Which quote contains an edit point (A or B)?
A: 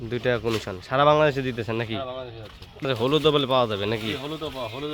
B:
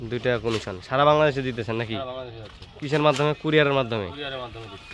A